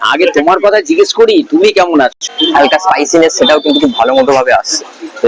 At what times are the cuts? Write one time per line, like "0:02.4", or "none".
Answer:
0:02.2